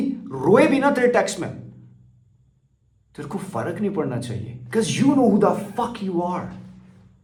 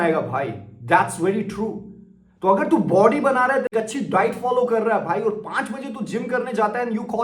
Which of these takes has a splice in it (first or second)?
second